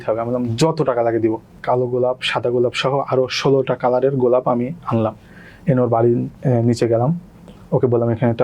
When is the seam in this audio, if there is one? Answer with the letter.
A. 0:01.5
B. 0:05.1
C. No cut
A